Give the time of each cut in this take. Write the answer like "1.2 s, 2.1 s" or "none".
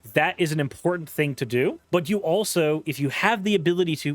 1.8 s